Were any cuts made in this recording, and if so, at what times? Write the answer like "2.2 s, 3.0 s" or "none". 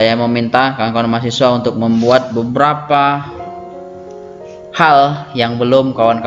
none